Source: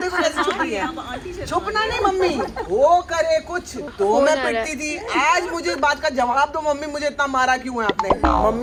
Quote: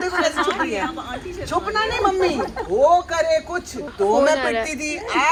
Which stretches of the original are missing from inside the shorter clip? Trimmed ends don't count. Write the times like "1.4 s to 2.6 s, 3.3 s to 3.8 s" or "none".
none